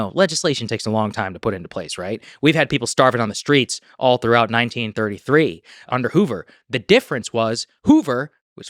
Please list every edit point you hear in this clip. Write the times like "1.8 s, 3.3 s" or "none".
5.9 s